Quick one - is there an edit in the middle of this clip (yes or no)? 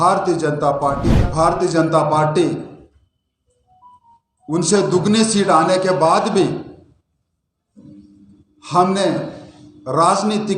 yes